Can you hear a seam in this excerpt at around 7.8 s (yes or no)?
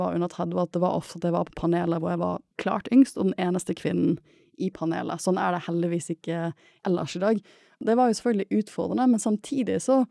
yes